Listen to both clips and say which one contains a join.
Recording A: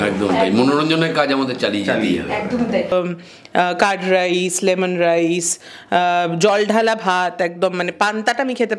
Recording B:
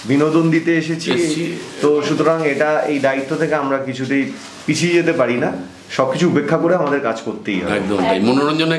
A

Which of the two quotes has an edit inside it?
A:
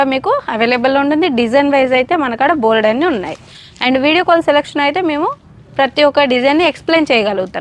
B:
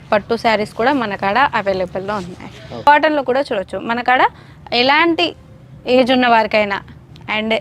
B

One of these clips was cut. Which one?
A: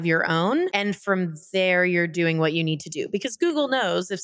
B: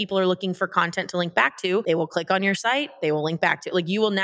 B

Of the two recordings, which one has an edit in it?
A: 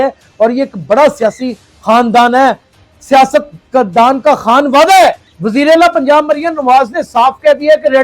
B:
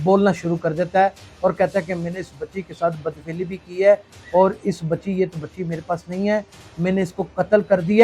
A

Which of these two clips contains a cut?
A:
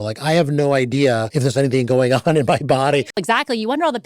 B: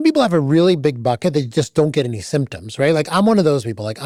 A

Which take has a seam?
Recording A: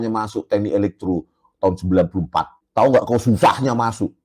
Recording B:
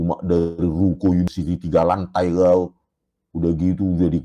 A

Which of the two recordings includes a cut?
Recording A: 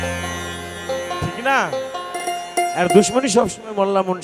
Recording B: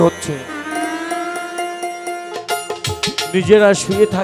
B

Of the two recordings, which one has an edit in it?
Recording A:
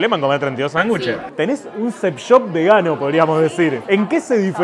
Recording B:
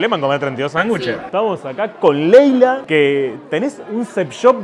A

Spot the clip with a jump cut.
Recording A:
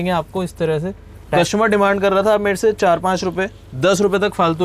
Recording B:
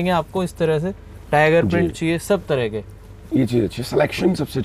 A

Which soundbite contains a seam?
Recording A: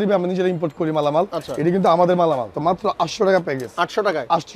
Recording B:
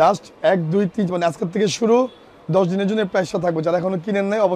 A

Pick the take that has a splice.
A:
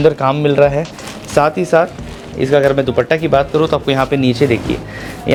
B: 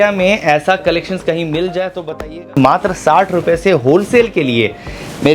B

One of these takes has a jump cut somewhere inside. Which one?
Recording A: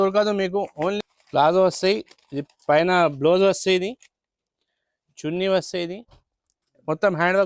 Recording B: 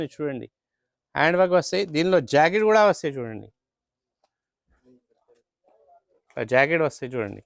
A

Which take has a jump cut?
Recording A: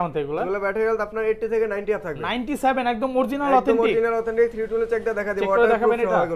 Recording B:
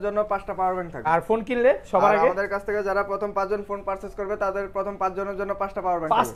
B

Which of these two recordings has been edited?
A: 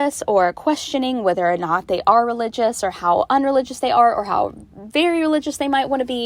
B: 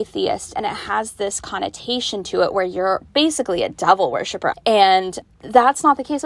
B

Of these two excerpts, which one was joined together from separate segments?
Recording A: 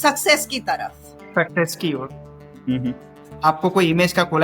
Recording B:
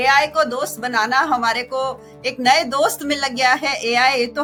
A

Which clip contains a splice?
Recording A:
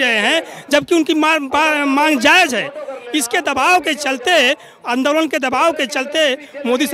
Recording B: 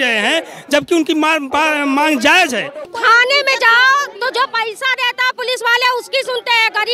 B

